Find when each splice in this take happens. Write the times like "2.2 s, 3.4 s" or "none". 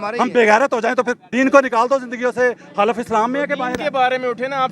1.2 s